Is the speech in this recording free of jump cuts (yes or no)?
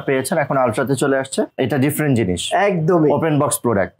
no